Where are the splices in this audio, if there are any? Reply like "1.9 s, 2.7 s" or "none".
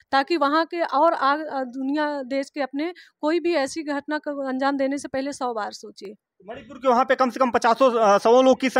none

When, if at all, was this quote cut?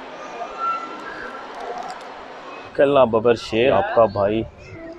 2.7 s, 3.7 s

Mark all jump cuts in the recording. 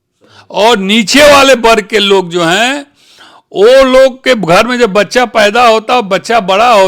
none

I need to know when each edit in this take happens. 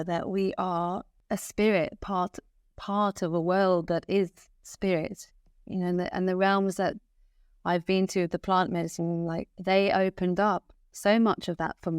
1.1 s, 9.5 s

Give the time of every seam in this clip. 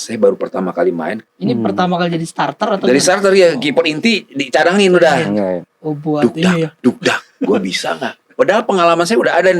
1.2 s, 5.7 s

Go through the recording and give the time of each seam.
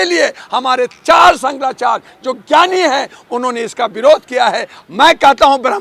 4.8 s

